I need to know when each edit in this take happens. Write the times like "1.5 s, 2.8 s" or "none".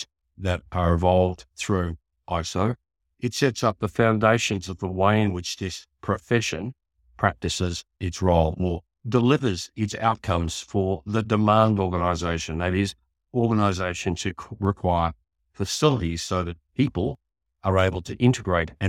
none